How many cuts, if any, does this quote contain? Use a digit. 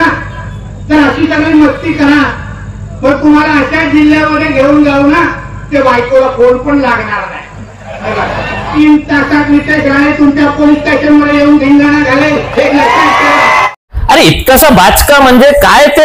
2